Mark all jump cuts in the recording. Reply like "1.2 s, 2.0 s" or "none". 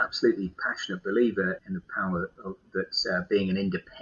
1.6 s